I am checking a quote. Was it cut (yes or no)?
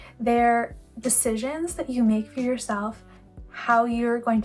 no